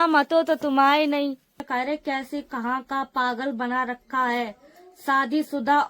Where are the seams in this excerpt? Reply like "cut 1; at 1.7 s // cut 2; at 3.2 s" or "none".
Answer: cut 1; at 1.6 s